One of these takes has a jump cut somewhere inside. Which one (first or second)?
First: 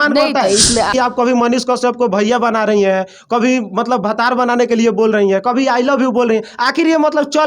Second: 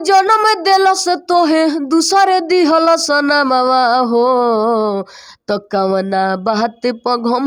first